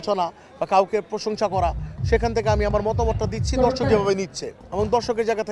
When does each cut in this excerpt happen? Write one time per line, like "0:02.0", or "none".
none